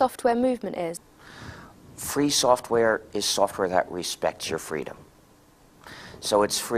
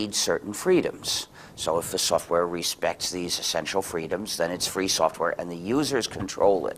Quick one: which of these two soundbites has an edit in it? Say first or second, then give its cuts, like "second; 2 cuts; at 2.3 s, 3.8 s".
second; 1 cut; at 3.9 s